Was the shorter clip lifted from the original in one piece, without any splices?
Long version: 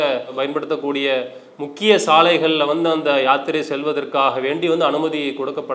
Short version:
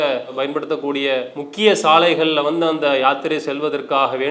no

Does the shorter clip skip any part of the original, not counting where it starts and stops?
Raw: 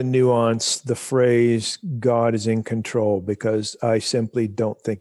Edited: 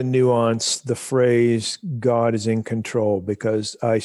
no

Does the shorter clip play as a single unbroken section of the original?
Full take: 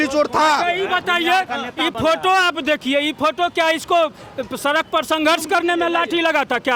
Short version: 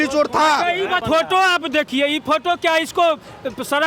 no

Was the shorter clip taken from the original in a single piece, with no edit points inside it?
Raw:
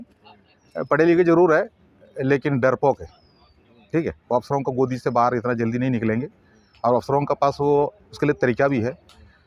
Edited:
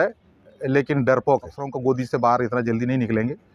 no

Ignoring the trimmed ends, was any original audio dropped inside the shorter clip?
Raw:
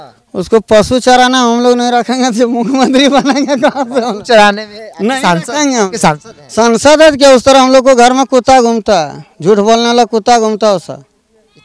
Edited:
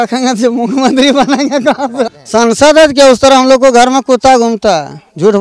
yes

